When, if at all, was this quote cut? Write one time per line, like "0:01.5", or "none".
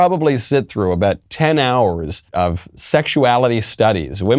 0:02.2